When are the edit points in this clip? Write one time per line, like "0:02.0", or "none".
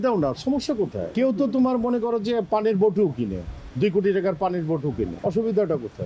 0:01.1
0:05.1